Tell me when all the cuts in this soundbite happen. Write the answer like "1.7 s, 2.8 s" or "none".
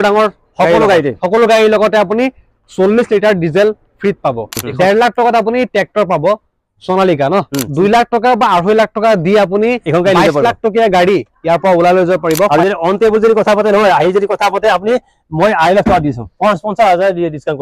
4.6 s, 7.7 s, 12.4 s